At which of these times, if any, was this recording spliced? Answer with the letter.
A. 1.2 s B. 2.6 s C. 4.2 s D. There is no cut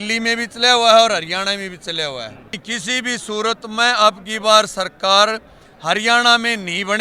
B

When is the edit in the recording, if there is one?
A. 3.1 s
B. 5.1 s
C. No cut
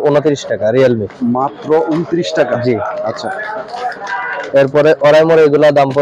C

